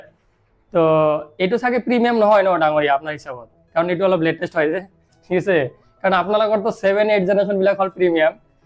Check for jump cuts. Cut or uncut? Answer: uncut